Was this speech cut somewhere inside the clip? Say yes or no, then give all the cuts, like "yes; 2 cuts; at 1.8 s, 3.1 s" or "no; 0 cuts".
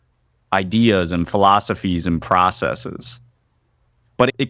no; 0 cuts